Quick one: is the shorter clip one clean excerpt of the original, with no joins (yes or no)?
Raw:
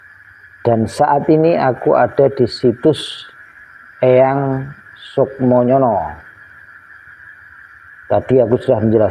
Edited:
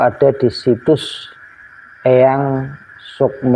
yes